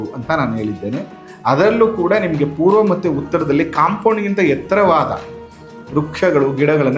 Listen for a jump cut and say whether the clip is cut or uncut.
uncut